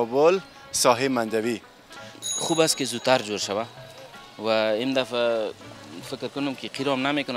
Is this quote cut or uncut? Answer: cut